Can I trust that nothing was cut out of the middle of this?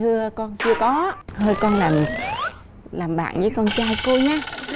no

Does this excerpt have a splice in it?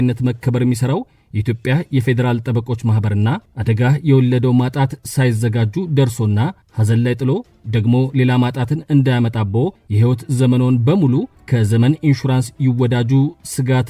yes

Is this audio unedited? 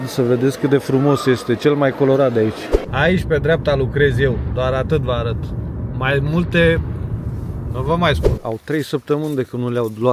no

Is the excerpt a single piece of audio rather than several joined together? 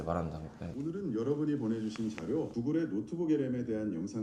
yes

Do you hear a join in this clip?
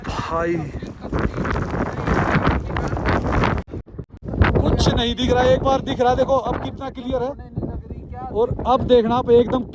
no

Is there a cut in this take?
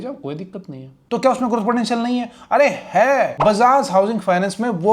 yes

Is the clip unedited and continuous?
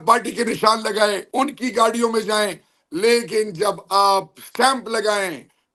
yes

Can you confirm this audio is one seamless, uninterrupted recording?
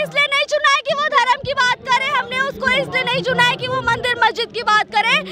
yes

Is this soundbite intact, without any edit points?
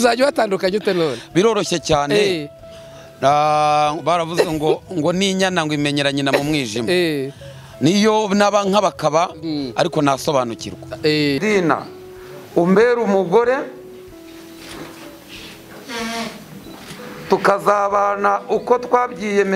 no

